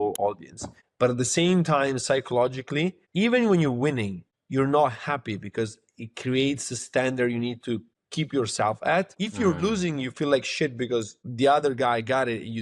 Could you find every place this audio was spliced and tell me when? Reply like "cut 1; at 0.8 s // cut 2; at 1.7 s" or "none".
none